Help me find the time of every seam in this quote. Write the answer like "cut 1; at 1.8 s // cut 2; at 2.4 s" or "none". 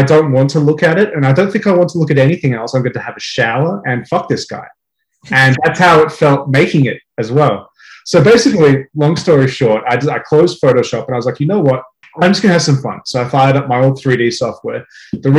cut 1; at 12.0 s